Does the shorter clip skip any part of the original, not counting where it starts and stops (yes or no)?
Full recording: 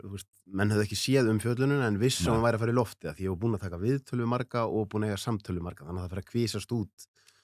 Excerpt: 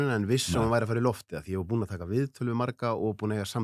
no